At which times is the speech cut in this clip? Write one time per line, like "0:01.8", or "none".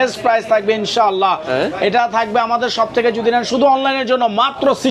none